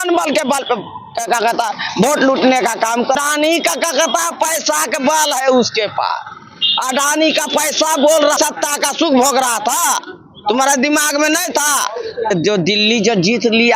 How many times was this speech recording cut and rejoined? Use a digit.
2